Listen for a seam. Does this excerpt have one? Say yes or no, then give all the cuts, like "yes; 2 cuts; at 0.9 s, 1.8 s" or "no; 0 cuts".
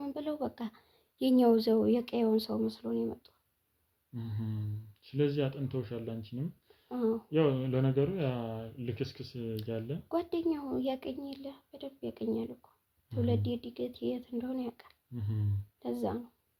no; 0 cuts